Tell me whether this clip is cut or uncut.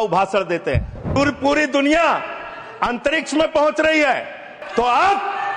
cut